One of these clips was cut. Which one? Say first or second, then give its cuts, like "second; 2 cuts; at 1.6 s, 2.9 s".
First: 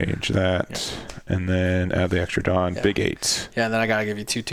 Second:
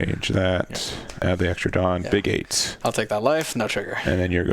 second; 2 cuts; at 1.2 s, 2.6 s